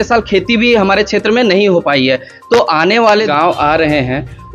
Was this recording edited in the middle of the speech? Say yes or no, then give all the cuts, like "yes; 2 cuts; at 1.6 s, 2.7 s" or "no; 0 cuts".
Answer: yes; 1 cut; at 3.3 s